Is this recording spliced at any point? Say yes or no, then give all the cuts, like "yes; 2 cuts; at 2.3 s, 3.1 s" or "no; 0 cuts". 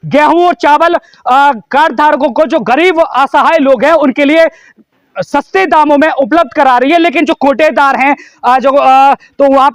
no; 0 cuts